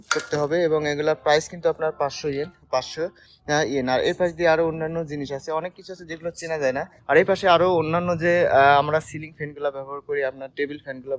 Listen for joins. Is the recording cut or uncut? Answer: cut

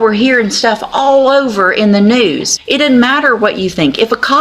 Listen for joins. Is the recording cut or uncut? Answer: cut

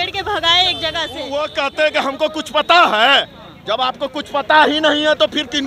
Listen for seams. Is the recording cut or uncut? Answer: cut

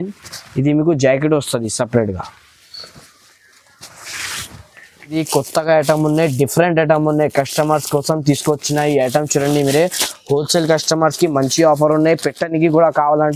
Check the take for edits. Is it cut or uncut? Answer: cut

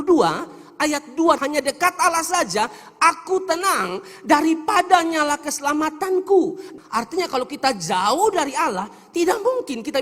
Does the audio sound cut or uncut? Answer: cut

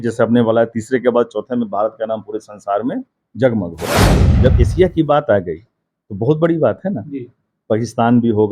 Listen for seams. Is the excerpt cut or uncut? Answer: cut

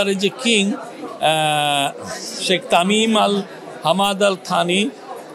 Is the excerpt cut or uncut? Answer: uncut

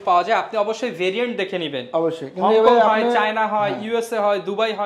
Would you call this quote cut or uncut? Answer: uncut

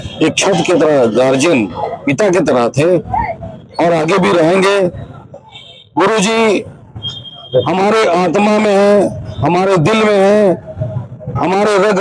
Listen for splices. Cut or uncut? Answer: uncut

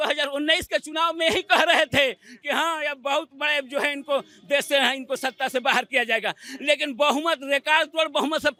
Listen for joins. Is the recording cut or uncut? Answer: uncut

